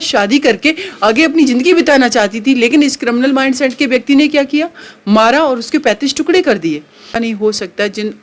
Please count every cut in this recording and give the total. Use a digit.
1